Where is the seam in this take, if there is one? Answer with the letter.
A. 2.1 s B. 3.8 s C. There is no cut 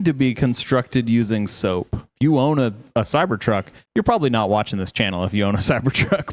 A